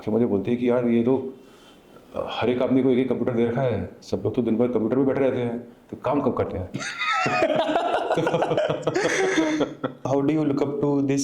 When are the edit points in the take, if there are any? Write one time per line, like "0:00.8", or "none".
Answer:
0:10.1